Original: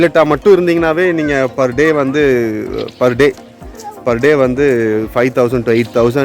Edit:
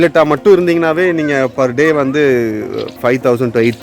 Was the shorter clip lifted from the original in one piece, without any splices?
no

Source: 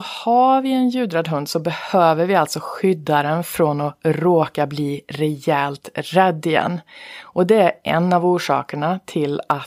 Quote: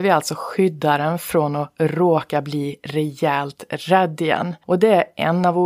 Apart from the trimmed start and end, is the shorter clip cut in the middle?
yes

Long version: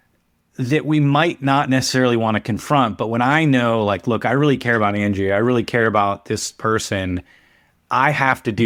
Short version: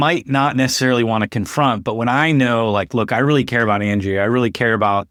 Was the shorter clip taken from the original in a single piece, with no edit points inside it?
yes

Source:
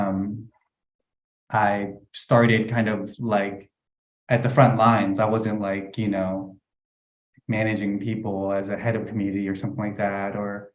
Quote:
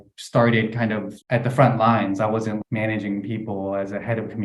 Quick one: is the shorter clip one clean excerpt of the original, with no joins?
no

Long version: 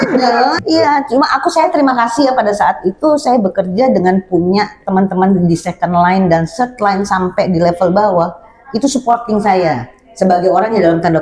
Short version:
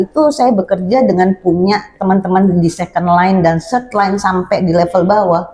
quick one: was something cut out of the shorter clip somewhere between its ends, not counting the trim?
no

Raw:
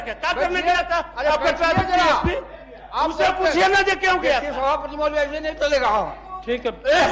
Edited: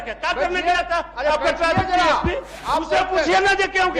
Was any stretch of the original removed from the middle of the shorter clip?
yes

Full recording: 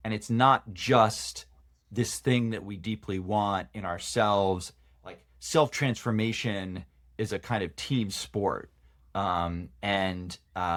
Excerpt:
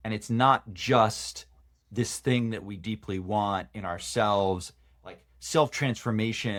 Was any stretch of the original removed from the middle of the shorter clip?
no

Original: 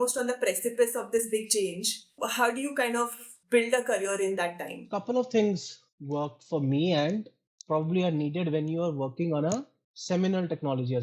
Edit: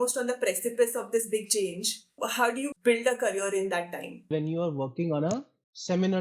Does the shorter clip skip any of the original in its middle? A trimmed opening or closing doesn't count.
yes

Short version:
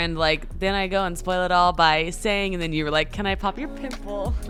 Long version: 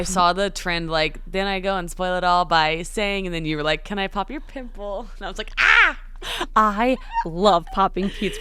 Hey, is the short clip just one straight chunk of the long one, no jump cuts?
yes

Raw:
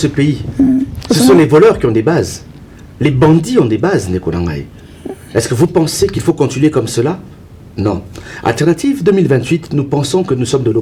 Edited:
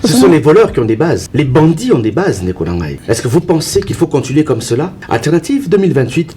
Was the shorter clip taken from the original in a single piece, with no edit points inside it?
no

